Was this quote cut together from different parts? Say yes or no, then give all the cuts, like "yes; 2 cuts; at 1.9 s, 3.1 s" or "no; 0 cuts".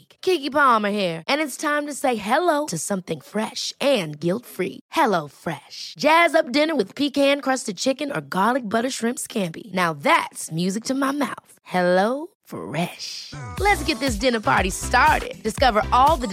no; 0 cuts